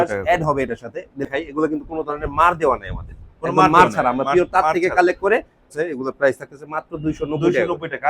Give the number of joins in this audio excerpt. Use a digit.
2